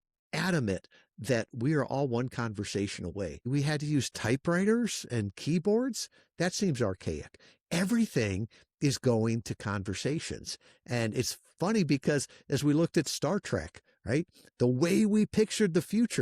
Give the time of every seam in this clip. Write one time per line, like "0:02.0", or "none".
0:03.4